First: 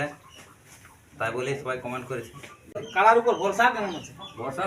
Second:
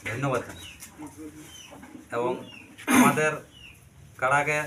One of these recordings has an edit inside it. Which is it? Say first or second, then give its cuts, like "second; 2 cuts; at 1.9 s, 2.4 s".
first; 1 cut; at 2.8 s